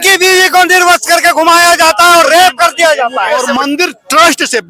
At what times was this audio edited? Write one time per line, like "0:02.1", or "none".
0:03.5

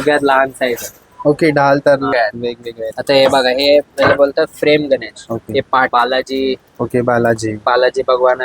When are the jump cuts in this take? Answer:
0:02.1
0:05.9

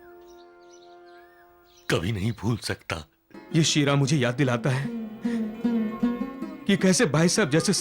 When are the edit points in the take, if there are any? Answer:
0:03.3

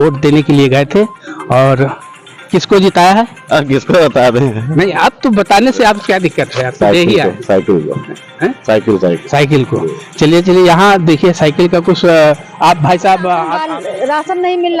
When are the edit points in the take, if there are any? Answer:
0:13.6

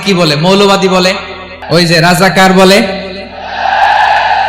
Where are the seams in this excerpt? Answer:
0:01.5

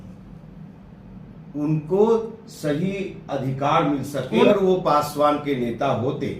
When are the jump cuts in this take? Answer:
0:04.5

